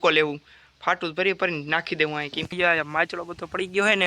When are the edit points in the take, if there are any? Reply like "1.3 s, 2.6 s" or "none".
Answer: 2.5 s